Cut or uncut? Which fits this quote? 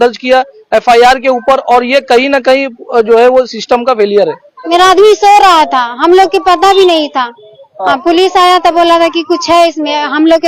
cut